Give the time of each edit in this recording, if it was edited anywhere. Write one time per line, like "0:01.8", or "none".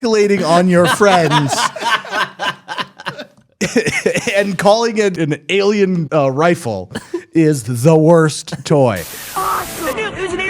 0:05.2
0:06.1
0:09.3

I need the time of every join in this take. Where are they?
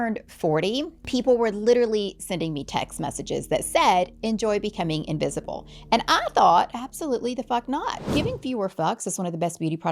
0:01.0
0:08.0

